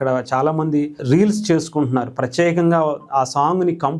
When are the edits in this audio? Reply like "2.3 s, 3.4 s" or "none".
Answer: 1.0 s